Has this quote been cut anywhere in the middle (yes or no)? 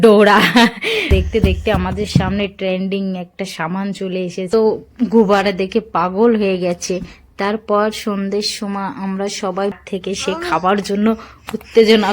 yes